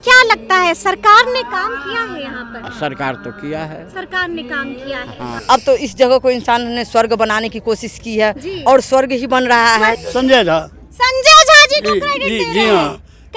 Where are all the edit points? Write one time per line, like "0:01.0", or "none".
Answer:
0:05.3
0:10.0